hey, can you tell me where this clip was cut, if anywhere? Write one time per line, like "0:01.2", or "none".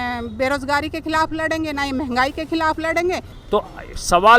0:03.3